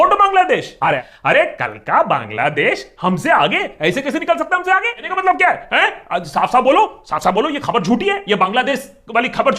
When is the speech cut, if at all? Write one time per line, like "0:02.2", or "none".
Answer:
0:01.0
0:05.0